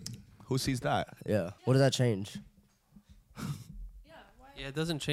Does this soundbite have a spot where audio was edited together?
yes; 1 cut; at 1.5 s

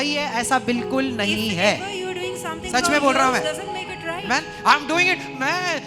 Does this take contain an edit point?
no; 0 cuts

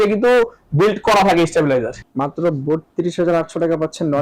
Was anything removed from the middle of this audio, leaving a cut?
yes; 1 cut; at 2.0 s

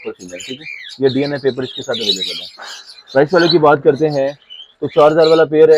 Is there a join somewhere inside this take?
no; 0 cuts

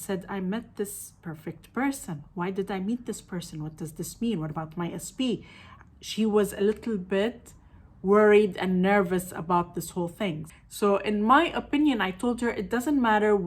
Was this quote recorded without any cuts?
no; 1 cut; at 10.5 s

